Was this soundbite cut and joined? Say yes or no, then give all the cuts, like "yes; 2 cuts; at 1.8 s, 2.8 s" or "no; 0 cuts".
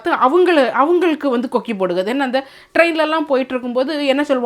no; 0 cuts